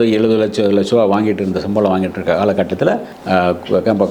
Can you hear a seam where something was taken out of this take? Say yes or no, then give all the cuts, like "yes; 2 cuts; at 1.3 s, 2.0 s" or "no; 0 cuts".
yes; 1 cut; at 3.1 s